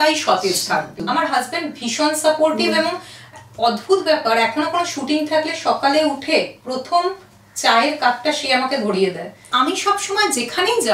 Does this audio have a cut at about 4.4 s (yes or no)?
no